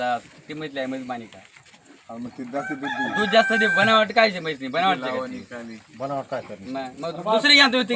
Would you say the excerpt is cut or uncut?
uncut